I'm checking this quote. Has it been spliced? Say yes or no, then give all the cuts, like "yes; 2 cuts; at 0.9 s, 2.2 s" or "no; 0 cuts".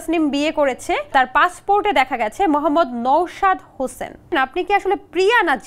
yes; 2 cuts; at 1.1 s, 4.3 s